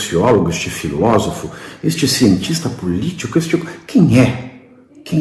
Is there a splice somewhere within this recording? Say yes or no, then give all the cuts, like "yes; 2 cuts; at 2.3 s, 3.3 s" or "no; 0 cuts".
no; 0 cuts